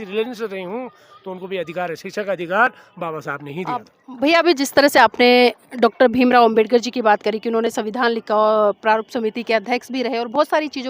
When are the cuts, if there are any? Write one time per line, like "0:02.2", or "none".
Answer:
0:04.0